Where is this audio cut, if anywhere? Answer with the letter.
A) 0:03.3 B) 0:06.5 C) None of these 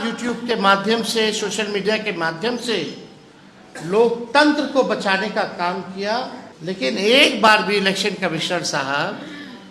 B